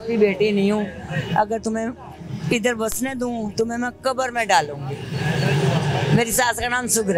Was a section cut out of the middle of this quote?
no; 0 cuts

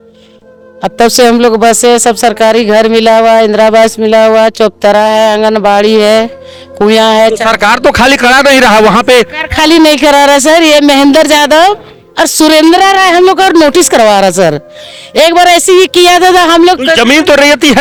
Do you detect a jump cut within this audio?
no; 0 cuts

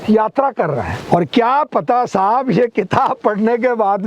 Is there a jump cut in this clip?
yes; 1 cut; at 1.0 s

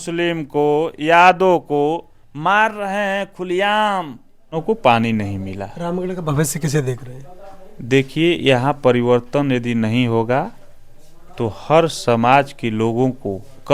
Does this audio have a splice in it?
yes; 1 cut; at 4.6 s

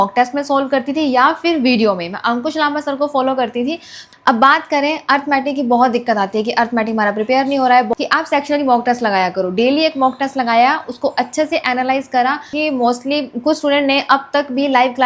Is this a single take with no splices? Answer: no; 3 cuts; at 4.0 s, 7.9 s, 12.5 s

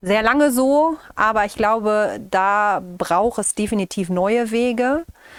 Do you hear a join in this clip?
no; 0 cuts

